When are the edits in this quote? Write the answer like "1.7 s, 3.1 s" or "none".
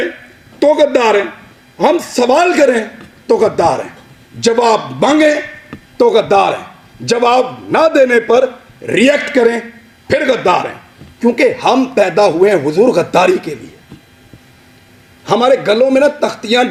none

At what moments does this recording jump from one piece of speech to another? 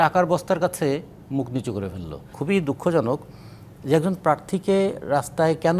2.3 s

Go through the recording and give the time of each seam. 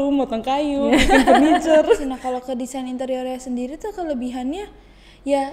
2.2 s

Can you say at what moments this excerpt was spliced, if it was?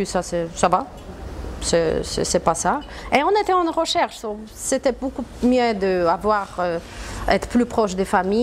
none

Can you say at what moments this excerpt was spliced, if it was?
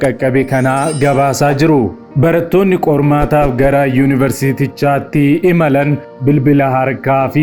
6.1 s

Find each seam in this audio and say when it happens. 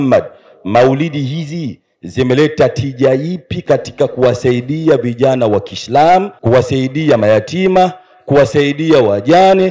6.3 s

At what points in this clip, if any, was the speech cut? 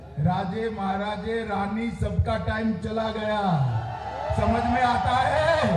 none

